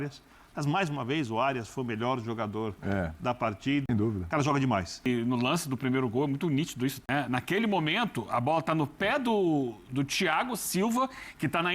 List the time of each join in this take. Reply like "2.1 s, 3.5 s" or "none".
3.9 s, 5.1 s, 7.0 s